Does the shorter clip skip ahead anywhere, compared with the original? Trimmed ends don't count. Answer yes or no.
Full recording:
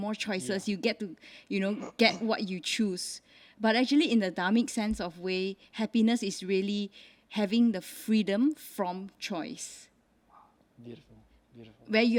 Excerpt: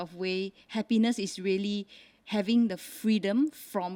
no